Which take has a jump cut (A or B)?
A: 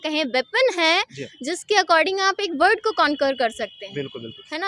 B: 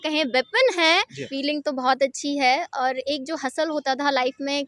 B